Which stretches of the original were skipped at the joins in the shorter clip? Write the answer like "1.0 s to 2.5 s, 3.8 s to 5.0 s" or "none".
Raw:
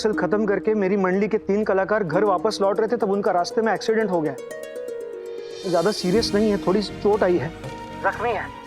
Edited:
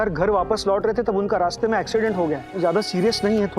4.4 s to 5.6 s